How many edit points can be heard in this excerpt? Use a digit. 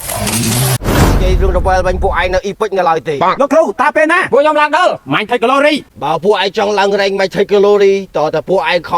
1